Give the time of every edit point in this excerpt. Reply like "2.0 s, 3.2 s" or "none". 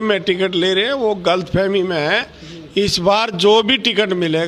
none